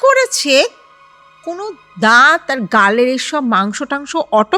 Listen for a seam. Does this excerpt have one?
no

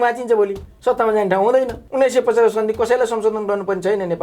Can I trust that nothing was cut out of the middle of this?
no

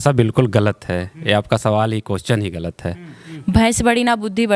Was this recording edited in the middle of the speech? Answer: yes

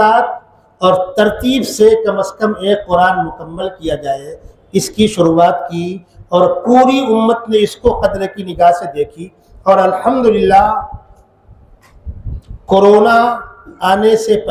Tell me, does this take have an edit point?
no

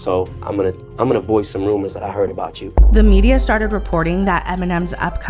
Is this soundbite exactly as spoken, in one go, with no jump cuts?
yes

